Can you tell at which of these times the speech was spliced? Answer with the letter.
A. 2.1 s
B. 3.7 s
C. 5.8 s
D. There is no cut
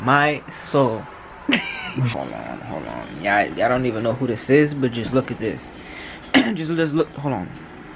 A